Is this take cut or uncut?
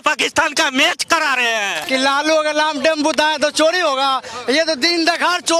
cut